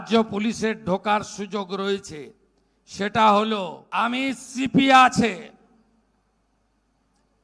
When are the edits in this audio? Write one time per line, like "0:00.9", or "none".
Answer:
0:03.8